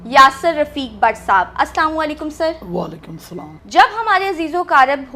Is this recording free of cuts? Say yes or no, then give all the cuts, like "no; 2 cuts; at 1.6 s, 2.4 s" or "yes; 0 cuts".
yes; 0 cuts